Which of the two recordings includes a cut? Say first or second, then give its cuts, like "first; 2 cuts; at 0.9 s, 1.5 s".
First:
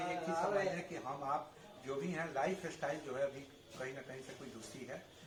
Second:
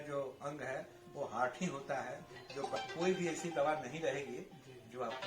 second; 1 cut; at 2.8 s